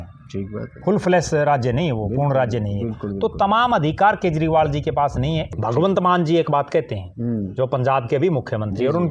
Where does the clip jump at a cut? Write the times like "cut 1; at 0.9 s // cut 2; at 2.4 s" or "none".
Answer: cut 1; at 5.5 s